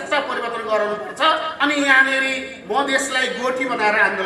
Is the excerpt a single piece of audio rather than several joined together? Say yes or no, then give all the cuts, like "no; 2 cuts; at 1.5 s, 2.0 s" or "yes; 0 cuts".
no; 1 cut; at 1.5 s